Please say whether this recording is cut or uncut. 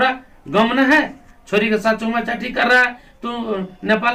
uncut